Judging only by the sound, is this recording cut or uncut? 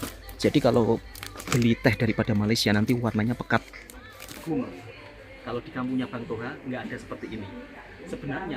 cut